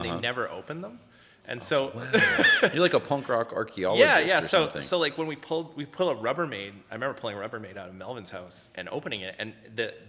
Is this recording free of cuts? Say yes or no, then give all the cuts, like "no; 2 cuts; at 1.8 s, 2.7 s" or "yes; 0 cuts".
yes; 0 cuts